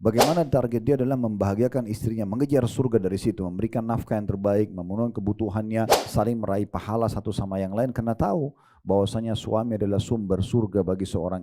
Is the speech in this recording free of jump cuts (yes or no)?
no